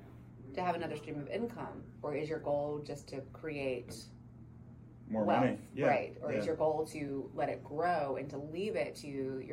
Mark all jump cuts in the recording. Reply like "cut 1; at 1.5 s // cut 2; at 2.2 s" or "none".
none